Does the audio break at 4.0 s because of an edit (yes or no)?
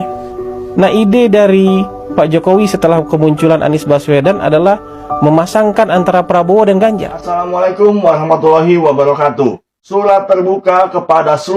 no